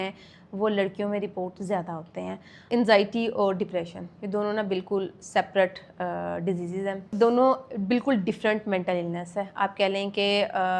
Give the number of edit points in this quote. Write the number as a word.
one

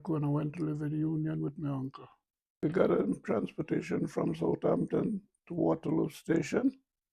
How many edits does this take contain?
one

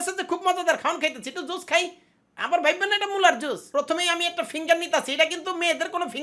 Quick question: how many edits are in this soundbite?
one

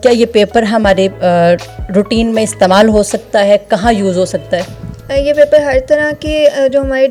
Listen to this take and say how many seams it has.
zero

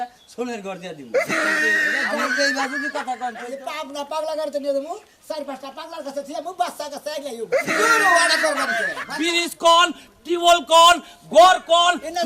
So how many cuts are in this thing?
two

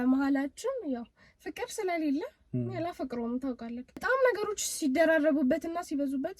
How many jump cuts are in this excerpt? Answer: one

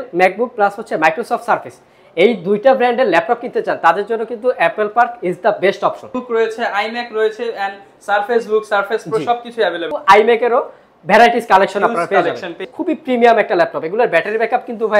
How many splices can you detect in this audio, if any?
three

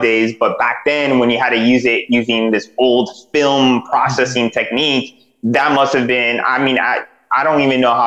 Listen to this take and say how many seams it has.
zero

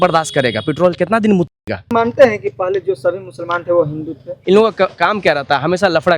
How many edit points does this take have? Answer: two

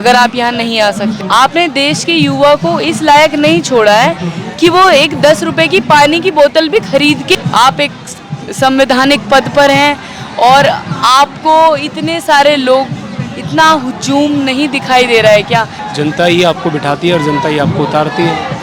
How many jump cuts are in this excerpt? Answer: three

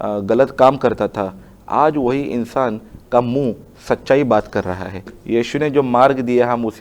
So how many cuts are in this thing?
one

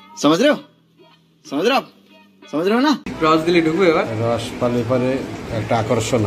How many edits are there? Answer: one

